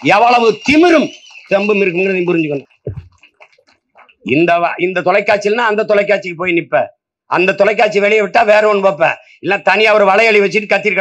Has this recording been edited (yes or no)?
yes